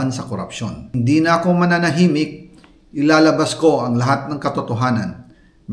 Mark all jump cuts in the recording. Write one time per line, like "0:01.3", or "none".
0:00.9